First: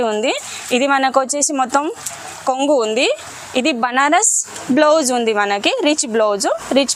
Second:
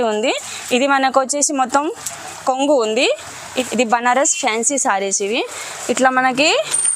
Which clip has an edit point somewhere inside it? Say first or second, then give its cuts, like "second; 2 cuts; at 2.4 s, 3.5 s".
second; 1 cut; at 3.4 s